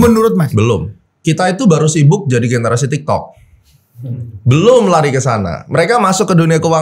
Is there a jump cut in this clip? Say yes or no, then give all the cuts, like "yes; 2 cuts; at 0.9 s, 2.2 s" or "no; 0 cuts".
yes; 1 cut; at 1.2 s